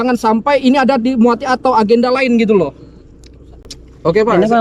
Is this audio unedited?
yes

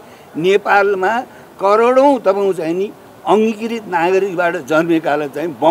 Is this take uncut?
yes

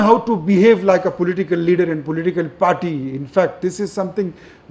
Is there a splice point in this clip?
no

